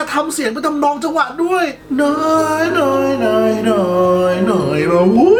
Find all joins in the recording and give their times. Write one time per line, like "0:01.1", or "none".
none